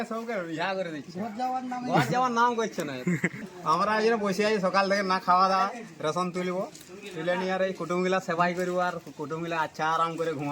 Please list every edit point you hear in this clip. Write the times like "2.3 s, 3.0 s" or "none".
3.5 s